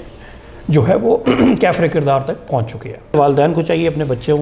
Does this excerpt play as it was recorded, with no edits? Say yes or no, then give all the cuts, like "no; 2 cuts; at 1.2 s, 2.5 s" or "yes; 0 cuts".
no; 1 cut; at 3.1 s